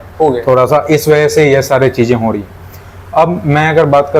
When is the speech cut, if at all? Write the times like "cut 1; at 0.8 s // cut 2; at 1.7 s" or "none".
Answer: none